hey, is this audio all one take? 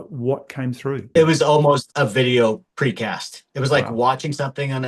no; 3 cuts; at 1.2 s, 1.9 s, 2.7 s

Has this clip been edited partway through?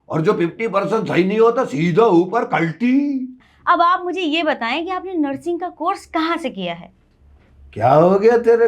yes; 1 cut; at 3.3 s

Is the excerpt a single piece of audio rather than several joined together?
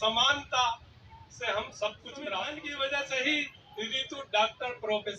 no; 1 cut; at 2.7 s

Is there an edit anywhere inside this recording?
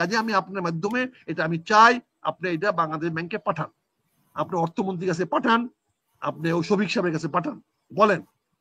no; 0 cuts

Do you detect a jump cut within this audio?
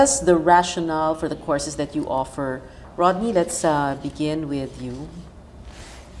no; 0 cuts

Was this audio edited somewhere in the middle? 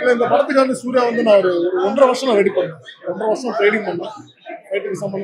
no; 0 cuts

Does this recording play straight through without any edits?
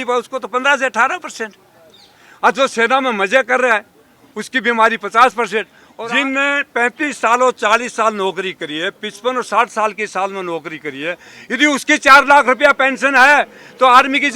no; 1 cut; at 5.8 s

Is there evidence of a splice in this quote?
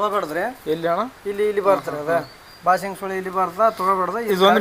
no; 0 cuts

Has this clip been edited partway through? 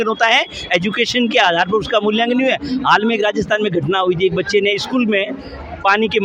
no; 0 cuts

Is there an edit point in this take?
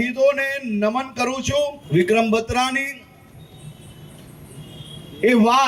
yes; 1 cut; at 1.8 s

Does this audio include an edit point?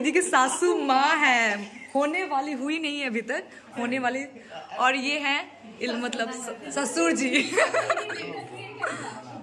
no; 0 cuts

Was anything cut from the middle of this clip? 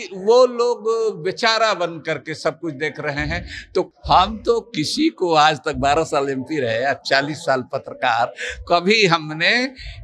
yes; 1 cut; at 3.9 s

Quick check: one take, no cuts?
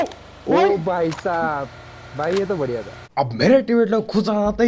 no; 1 cut; at 3.0 s

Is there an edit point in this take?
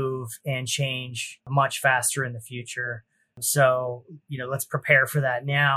yes; 2 cuts; at 1.5 s, 3.4 s

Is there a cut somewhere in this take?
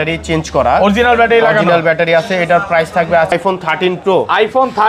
yes; 1 cut; at 3.3 s

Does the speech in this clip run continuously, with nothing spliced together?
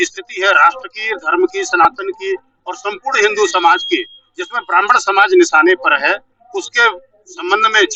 yes; 0 cuts

